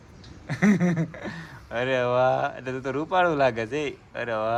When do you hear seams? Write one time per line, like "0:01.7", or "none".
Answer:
none